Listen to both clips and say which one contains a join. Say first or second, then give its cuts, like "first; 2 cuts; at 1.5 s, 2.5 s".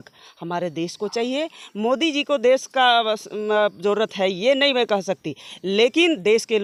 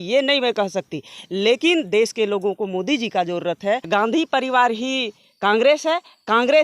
second; 1 cut; at 3.9 s